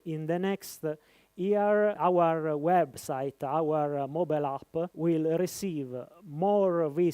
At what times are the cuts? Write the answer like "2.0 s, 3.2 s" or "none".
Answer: 2.0 s, 4.9 s